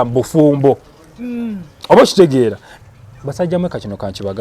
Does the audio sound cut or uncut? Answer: cut